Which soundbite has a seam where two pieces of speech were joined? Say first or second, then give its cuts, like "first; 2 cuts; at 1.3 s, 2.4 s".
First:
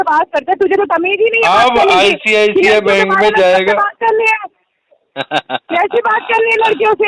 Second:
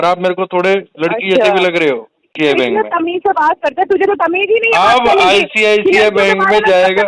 second; 1 cut; at 2.4 s